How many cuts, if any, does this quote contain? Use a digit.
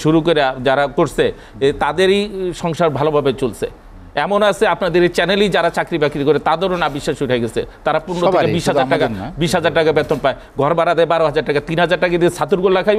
0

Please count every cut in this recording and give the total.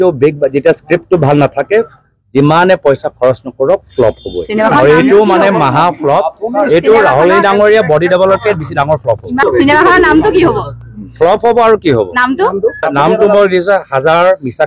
2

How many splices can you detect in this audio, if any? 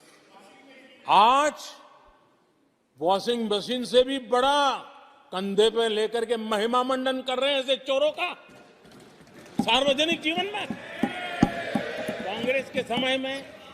1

